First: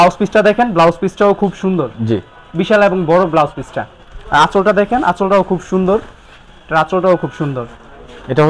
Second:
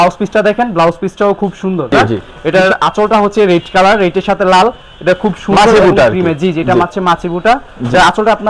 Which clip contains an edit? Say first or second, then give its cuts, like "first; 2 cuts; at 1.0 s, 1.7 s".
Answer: second; 1 cut; at 1.9 s